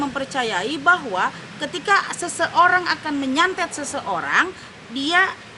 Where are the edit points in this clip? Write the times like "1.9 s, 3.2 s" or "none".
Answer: none